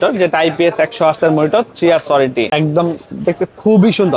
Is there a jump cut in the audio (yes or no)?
yes